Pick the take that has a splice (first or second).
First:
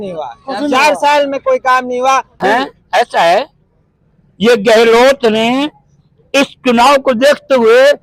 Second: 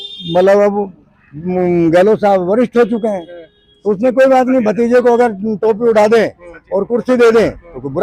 first